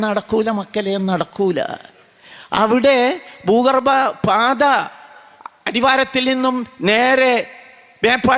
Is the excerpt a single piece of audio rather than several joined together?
yes; 0 cuts

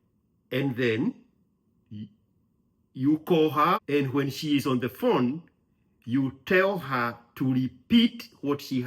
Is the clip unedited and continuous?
no; 1 cut; at 3.8 s

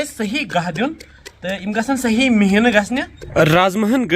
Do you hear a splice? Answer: yes; 1 cut; at 3.2 s

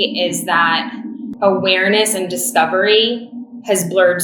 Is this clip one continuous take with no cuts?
no; 1 cut; at 1.2 s

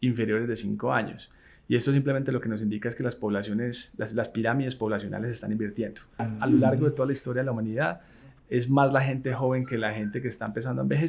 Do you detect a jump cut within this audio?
yes; 1 cut; at 6.3 s

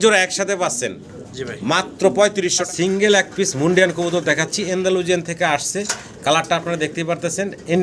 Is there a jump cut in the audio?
yes; 1 cut; at 2.6 s

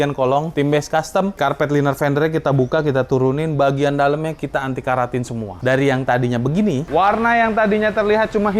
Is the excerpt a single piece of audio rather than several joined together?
no; 2 cuts; at 1.4 s, 6.8 s

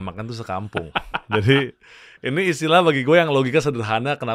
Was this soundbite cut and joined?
no; 0 cuts

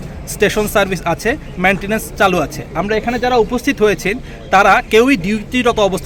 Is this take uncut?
yes; 0 cuts

